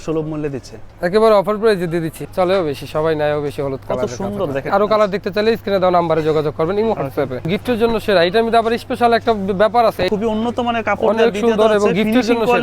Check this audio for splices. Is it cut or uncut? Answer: cut